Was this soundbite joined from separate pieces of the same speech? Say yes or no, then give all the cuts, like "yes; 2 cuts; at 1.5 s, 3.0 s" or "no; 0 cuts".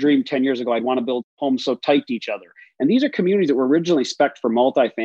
no; 0 cuts